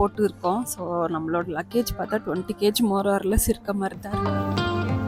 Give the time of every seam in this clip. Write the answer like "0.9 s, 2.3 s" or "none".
4.1 s

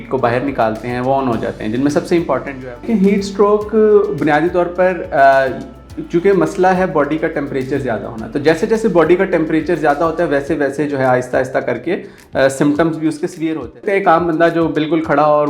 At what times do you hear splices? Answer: 2.8 s, 13.8 s

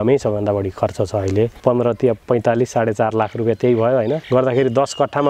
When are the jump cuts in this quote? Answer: 1.6 s, 4.2 s

